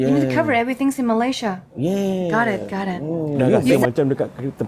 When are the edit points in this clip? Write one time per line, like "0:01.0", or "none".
0:03.7